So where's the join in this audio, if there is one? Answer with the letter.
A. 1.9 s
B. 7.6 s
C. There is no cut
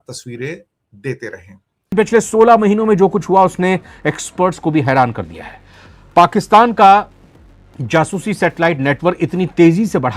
A